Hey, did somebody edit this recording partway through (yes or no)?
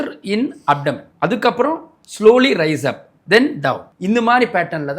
yes